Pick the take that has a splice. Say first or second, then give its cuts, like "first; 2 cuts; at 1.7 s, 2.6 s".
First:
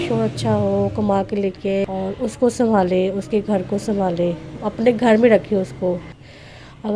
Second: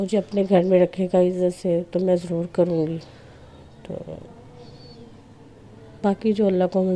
first; 1 cut; at 1.8 s